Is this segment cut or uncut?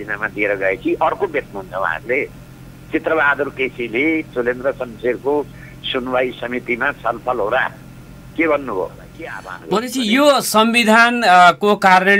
cut